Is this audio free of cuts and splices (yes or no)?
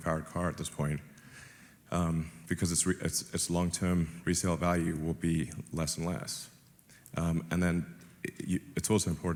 yes